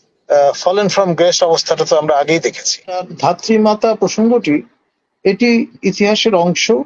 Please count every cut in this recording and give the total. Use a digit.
1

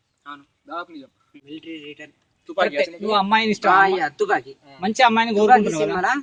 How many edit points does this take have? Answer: 0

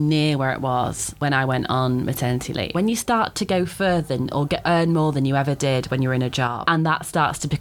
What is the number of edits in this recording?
3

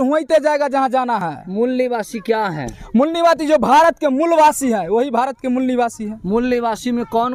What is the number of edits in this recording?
0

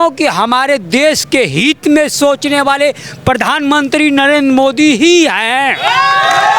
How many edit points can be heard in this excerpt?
0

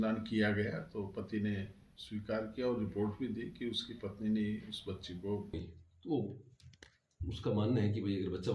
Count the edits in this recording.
1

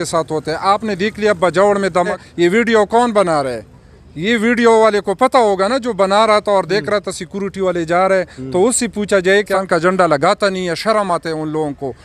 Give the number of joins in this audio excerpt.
2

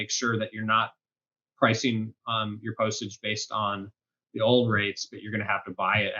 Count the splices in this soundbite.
0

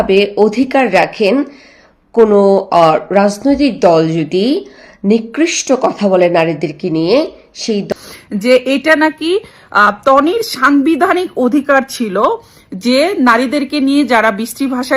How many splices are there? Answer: 1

